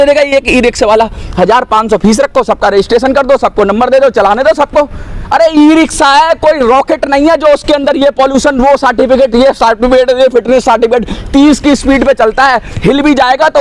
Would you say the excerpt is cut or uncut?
uncut